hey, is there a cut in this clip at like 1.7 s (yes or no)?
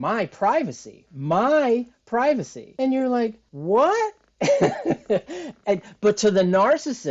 no